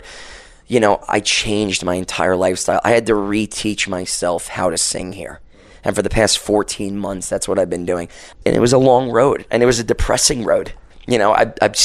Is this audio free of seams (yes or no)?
no